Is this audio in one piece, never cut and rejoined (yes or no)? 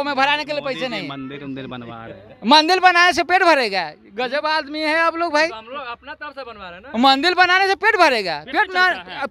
yes